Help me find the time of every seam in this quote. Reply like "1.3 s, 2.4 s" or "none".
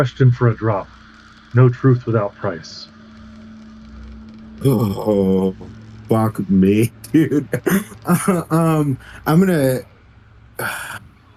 none